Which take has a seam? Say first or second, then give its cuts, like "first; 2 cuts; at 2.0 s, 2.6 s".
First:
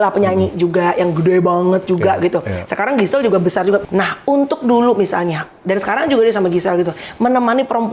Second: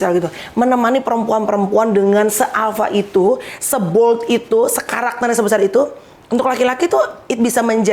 first; 1 cut; at 3.8 s